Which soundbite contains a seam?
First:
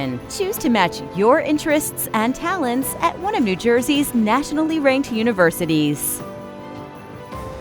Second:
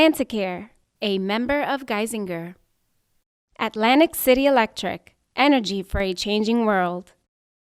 first; 1 cut; at 6.0 s

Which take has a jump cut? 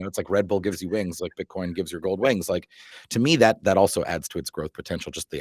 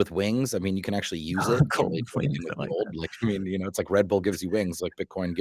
first; 1 cut; at 2.9 s

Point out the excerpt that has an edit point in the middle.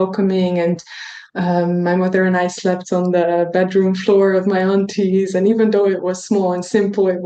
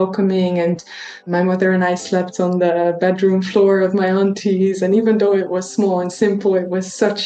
second; 1 cut; at 1.3 s

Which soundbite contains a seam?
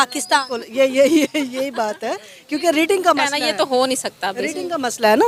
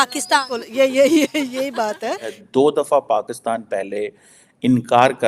second; 1 cut; at 2.3 s

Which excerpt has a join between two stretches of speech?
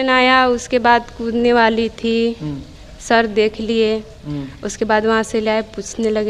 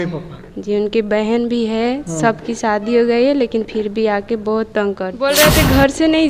second; 1 cut; at 5.2 s

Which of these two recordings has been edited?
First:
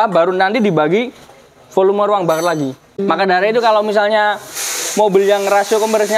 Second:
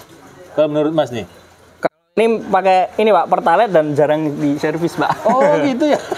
first; 1 cut; at 2.9 s

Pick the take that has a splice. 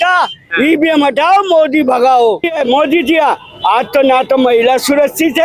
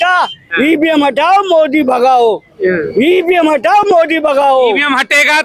first; 1 cut; at 2.5 s

